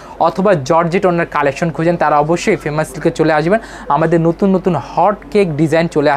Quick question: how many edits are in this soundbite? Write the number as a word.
zero